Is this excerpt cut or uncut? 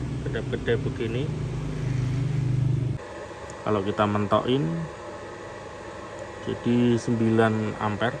cut